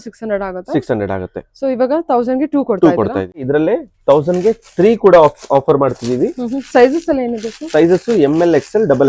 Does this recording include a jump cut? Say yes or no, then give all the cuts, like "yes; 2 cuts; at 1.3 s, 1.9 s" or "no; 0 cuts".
yes; 1 cut; at 3.4 s